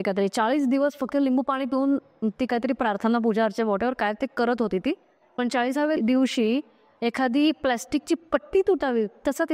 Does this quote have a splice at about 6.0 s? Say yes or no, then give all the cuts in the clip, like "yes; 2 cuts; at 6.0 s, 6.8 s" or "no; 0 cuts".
yes; 1 cut; at 6.0 s